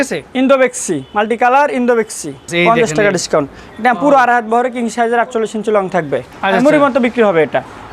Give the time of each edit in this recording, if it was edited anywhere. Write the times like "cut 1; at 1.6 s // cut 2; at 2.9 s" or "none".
cut 1; at 2.5 s // cut 2; at 6.3 s